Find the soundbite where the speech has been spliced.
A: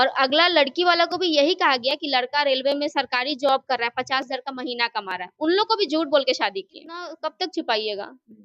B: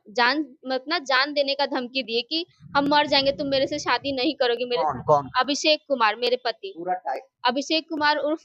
A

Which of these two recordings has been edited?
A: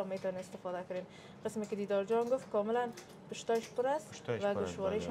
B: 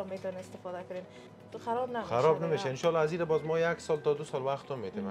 B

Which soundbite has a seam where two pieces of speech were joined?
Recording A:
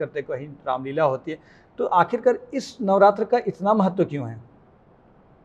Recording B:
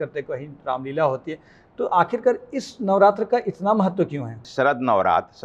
B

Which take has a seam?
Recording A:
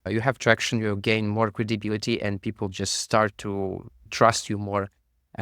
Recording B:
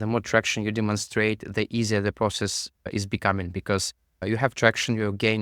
A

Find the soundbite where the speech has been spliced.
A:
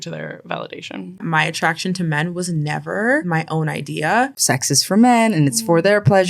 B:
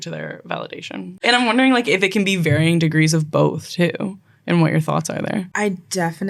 A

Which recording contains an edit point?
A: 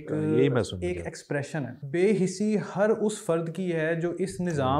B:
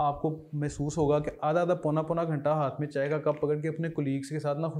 A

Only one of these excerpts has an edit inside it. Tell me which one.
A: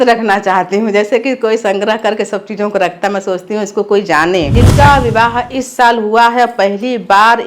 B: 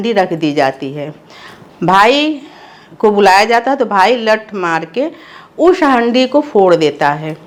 A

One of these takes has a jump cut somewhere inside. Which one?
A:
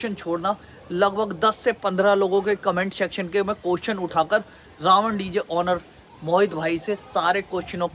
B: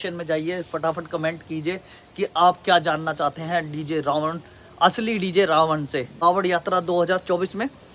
B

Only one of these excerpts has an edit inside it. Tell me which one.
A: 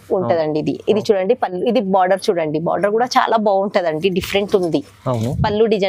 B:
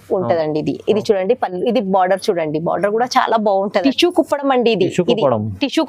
B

